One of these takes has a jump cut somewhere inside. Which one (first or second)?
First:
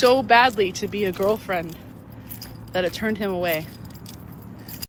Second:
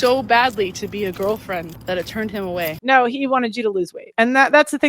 second